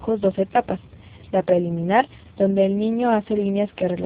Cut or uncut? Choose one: uncut